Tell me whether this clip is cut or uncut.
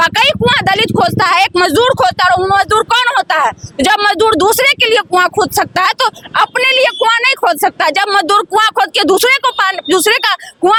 uncut